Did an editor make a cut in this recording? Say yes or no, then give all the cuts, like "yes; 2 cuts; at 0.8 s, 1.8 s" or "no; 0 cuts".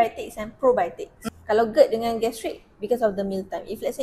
yes; 1 cut; at 1.2 s